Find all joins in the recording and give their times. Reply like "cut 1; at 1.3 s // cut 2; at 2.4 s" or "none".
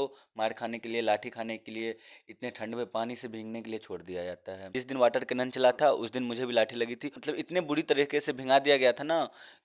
cut 1; at 4.8 s // cut 2; at 7.1 s

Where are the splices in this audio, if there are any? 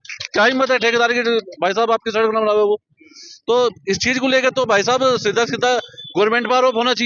none

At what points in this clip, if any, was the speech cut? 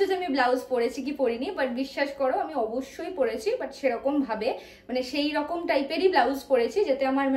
none

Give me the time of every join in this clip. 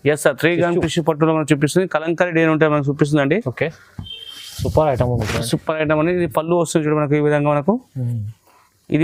none

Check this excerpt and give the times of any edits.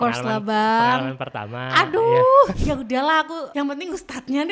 cut 1; at 2.6 s // cut 2; at 3.4 s

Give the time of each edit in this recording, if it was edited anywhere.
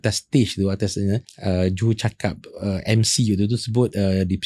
cut 1; at 1.3 s

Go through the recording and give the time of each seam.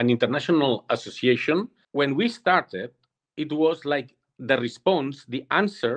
cut 1; at 1.8 s

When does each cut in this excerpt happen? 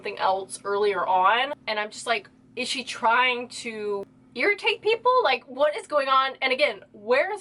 cut 1; at 1.6 s // cut 2; at 4.2 s

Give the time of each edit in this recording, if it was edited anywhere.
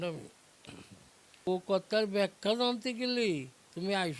cut 1; at 1.5 s

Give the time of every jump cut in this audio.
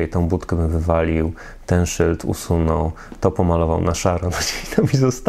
none

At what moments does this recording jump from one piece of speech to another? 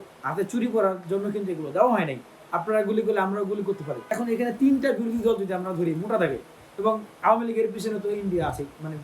cut 1; at 4.1 s

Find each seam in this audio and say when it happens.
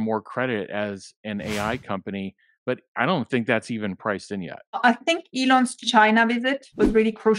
cut 1; at 4.8 s

